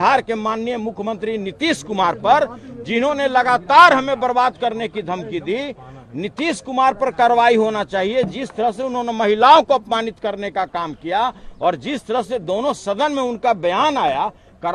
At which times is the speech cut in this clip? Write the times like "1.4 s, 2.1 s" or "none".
none